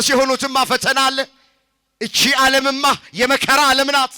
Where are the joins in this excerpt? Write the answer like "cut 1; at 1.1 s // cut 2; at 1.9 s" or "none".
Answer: none